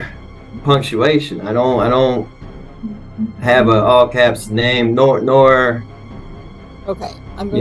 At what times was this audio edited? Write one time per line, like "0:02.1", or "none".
none